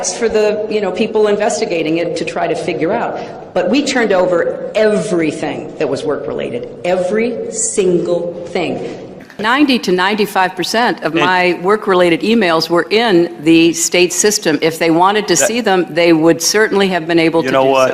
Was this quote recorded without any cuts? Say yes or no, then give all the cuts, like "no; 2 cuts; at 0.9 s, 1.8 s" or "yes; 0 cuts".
yes; 0 cuts